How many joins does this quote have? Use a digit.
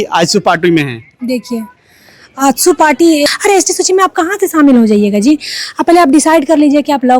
1